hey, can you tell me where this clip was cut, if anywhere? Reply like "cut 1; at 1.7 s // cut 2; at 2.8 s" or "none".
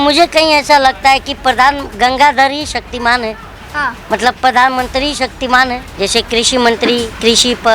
cut 1; at 5.9 s

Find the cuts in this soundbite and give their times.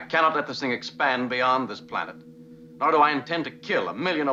none

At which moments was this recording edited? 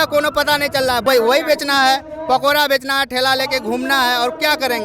cut 1; at 1.0 s

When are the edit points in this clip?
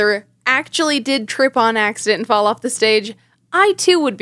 none

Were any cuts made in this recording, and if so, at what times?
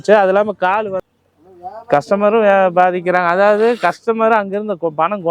cut 1; at 1.0 s

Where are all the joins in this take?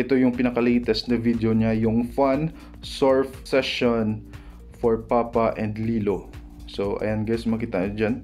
cut 1; at 3.4 s

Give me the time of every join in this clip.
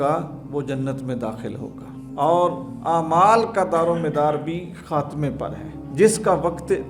none

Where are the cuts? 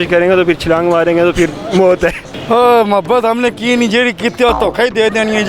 cut 1; at 2.3 s

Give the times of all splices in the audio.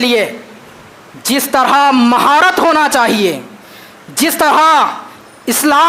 none

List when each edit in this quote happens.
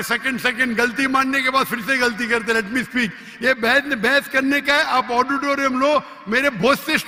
none

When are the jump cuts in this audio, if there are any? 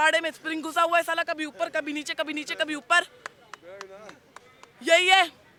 none

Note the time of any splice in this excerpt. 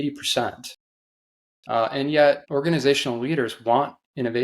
cut 1; at 2.4 s

